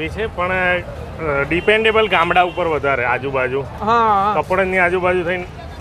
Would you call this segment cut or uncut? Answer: uncut